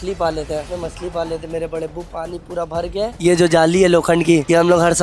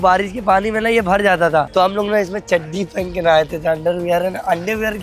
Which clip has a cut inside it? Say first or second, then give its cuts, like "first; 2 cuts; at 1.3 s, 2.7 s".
first; 1 cut; at 3.2 s